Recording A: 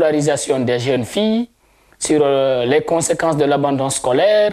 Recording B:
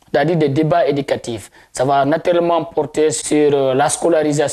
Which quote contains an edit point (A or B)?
B